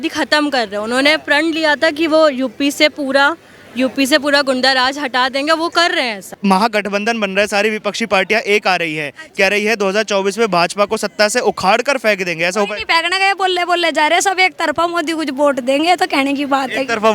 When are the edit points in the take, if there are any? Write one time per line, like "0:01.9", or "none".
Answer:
0:06.2